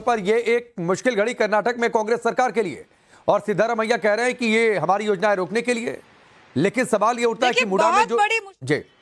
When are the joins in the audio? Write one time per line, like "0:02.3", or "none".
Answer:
none